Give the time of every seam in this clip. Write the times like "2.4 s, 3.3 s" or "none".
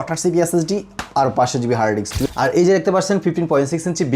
2.2 s